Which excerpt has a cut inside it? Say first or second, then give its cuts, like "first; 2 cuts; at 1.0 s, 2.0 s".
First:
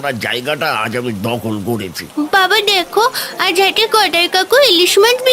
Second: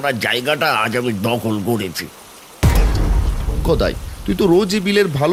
first; 1 cut; at 2.0 s